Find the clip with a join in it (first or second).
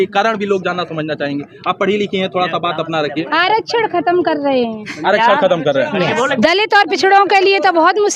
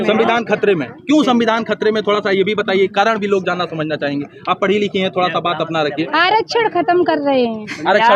first